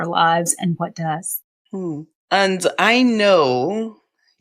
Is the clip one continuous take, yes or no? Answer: yes